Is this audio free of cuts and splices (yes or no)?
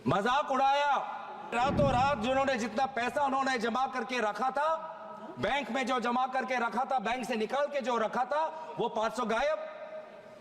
no